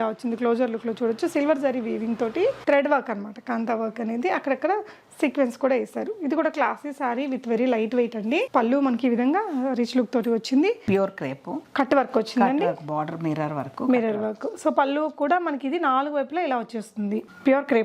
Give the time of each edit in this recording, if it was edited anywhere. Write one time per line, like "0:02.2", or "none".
0:02.6
0:10.8